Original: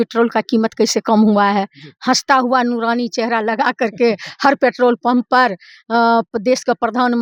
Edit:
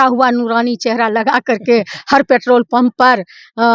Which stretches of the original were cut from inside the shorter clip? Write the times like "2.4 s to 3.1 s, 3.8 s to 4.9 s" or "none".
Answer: none